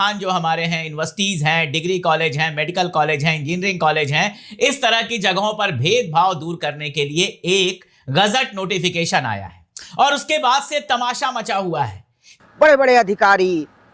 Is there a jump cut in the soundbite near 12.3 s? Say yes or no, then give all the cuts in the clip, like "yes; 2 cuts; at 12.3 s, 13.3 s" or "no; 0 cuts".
yes; 1 cut; at 12.3 s